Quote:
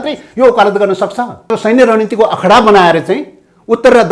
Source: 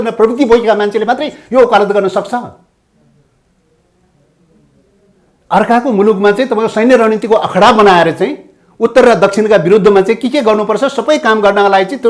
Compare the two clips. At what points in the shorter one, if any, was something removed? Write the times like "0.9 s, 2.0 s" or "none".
1.5 s